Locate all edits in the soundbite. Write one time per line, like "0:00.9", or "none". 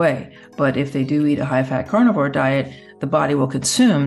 none